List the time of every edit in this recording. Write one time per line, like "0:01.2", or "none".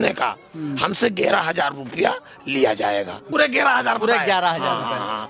0:03.2